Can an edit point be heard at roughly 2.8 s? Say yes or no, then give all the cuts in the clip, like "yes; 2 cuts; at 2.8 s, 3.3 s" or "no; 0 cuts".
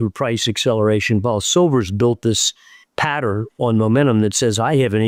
no; 0 cuts